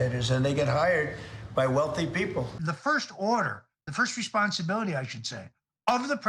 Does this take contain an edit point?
yes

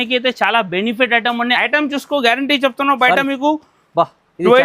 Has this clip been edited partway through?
yes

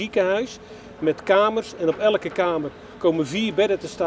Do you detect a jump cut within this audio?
no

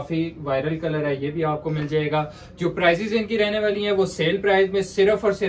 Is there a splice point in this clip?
no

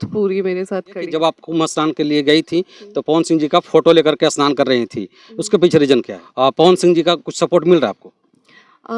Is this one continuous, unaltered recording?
no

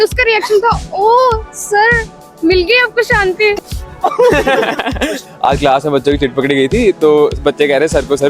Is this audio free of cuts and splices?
no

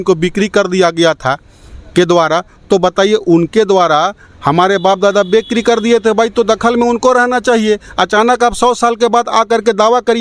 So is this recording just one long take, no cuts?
yes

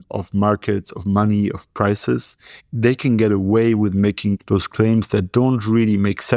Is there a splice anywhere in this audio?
no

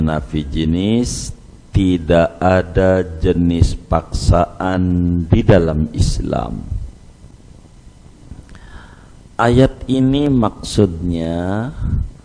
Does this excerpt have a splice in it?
yes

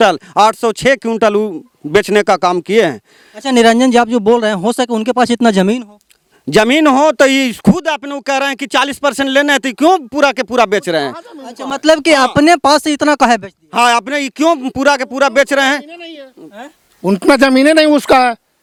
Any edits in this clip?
no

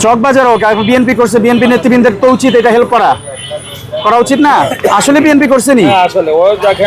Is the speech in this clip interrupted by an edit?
no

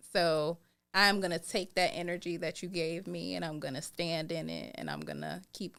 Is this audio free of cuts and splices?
yes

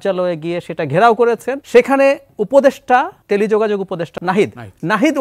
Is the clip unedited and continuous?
no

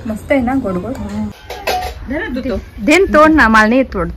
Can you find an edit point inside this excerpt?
yes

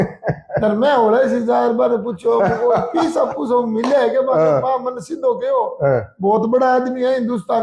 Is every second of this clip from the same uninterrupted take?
yes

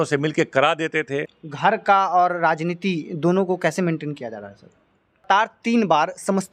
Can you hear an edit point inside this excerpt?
yes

